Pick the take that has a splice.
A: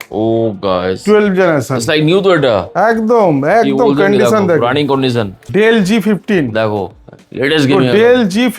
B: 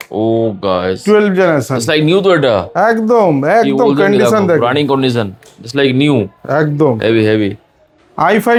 A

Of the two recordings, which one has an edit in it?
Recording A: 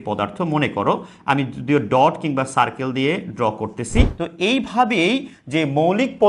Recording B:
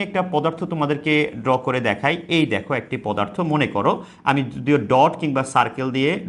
A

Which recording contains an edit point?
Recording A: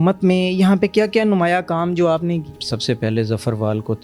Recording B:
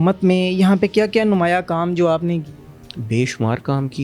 A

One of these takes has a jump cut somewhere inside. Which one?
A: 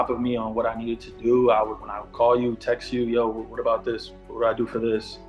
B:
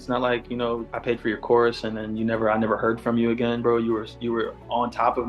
B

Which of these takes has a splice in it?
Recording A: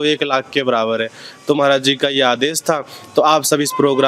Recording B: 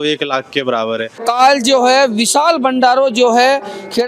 B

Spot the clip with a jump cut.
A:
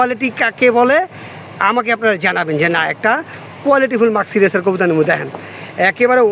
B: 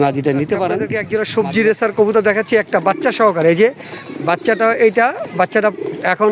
B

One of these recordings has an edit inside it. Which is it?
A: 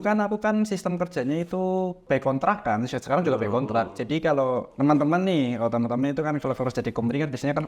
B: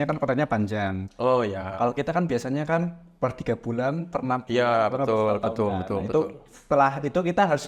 A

